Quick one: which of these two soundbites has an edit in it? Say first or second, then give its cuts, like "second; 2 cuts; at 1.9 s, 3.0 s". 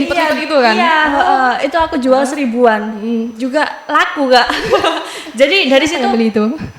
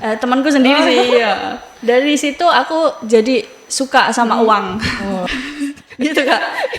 second; 1 cut; at 5.2 s